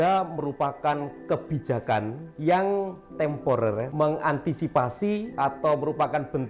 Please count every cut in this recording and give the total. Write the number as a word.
three